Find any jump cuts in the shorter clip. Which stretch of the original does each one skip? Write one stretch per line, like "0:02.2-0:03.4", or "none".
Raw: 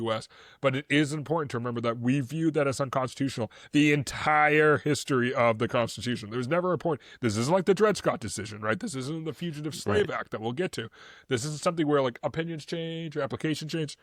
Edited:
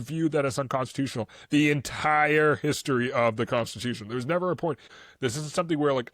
0:07.1-0:11.0

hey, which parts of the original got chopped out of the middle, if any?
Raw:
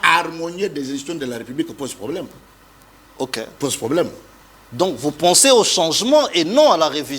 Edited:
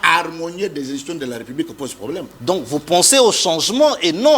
0:02.3-0:04.6

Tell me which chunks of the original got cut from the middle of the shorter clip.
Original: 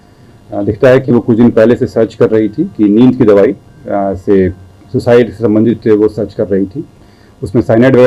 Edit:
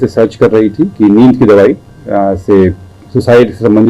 none

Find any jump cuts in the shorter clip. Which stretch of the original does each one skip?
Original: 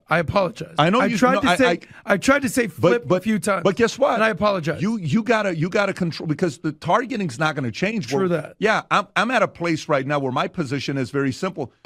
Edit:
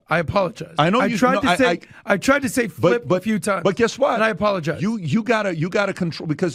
none

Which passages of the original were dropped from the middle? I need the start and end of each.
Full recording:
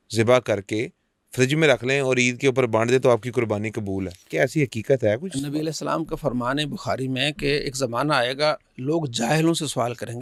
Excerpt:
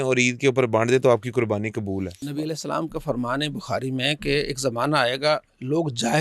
0:04.2-0:05.4

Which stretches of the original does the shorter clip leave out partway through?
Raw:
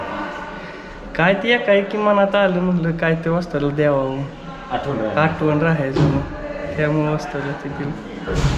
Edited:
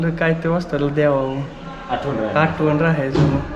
none

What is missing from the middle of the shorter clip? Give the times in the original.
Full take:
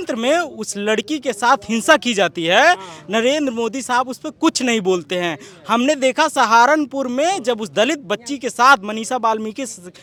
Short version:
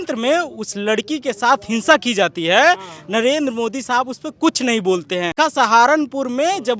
0:05.4-0:06.1

